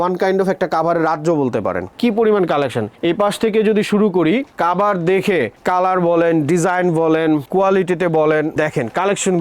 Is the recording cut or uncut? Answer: cut